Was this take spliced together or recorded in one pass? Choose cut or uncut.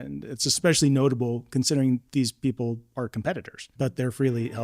cut